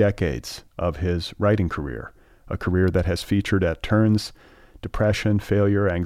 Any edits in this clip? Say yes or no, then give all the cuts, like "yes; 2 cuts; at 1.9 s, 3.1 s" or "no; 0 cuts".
no; 0 cuts